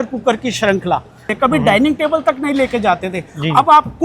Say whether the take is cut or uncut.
cut